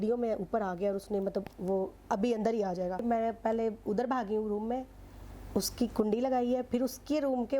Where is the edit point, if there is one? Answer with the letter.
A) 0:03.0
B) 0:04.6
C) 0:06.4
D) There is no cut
A